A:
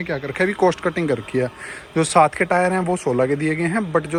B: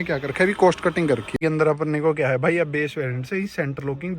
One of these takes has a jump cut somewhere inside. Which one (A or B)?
B